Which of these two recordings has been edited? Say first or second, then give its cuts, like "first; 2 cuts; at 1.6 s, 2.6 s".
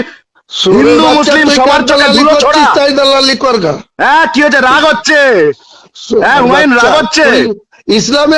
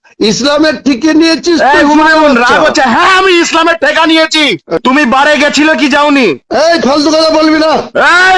second; 1 cut; at 4.8 s